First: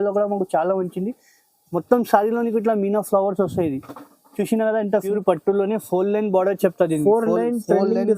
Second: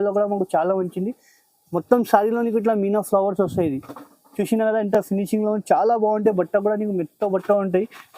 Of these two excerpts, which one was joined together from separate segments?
first; 1 cut; at 4.9 s

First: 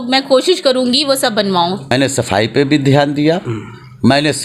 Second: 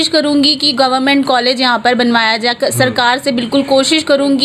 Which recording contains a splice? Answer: first; 1 cut; at 1.9 s

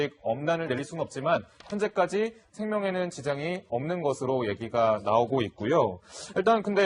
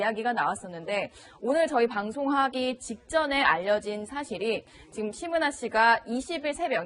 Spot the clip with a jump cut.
first; 1 cut; at 2.1 s

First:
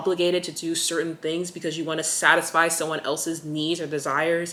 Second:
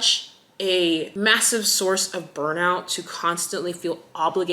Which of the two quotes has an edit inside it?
second; 1 cut; at 1.1 s

